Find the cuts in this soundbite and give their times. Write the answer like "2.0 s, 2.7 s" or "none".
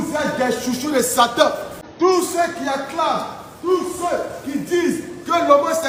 none